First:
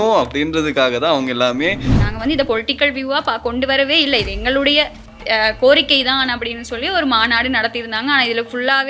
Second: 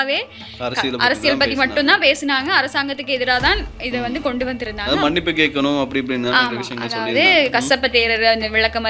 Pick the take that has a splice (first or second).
first